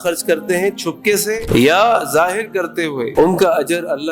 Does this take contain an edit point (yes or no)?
no